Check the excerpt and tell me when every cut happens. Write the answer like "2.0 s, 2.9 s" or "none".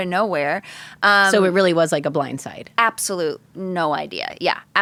none